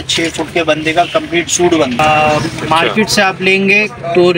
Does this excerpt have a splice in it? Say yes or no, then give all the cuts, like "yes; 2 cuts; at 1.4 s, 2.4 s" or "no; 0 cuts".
yes; 1 cut; at 2.0 s